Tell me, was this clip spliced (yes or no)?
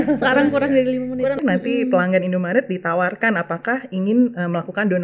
yes